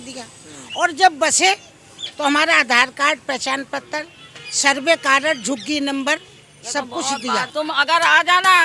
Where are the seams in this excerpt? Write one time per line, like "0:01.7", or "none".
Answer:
0:07.5